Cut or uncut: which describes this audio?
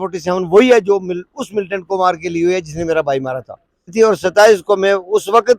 cut